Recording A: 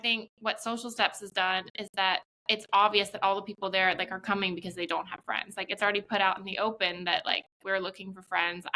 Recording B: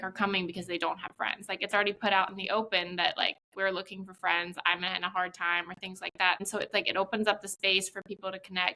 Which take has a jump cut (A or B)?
B